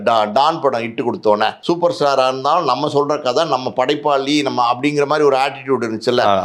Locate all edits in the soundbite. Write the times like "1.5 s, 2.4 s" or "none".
1.6 s